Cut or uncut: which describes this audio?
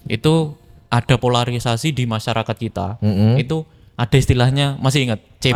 uncut